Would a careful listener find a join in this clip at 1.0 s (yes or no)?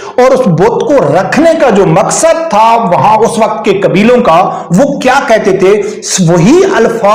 no